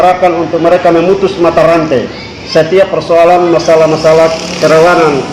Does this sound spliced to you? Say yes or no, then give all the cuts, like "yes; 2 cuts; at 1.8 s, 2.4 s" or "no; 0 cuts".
no; 0 cuts